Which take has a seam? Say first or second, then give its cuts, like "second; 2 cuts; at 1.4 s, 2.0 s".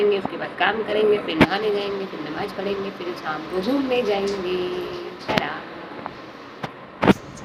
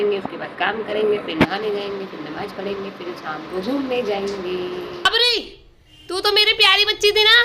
second; 1 cut; at 5.1 s